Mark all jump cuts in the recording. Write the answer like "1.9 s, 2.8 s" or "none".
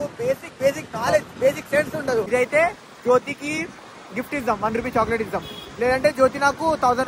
2.3 s